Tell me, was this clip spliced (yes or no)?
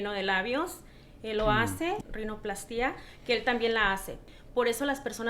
yes